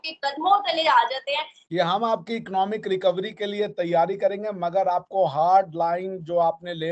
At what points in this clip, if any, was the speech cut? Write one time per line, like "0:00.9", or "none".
0:01.6